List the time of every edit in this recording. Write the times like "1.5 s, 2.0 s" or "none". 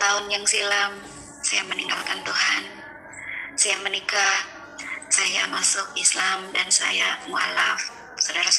none